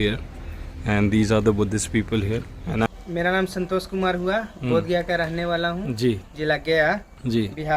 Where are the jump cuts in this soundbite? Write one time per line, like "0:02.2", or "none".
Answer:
0:02.9